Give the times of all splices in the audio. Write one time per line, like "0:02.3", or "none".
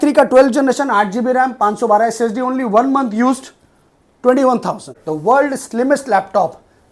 0:04.9